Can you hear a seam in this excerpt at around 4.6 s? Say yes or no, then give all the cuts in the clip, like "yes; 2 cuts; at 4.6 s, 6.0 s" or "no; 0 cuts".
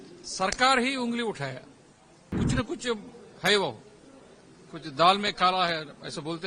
no; 1 cut; at 2.3 s